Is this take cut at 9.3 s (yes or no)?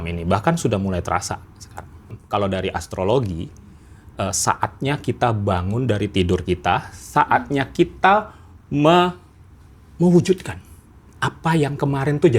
no